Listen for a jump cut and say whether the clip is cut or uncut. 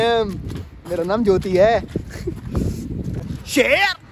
cut